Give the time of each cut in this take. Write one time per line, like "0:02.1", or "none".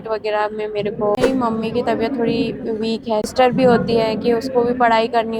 0:01.2
0:03.3